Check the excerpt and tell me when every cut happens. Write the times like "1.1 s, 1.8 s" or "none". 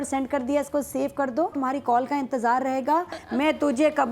1.5 s, 3.2 s